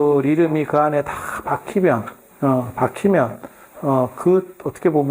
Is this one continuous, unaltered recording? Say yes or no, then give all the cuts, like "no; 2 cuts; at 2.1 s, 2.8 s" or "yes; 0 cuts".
yes; 0 cuts